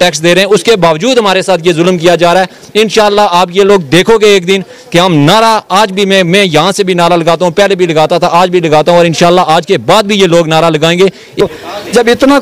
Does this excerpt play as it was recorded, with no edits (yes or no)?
no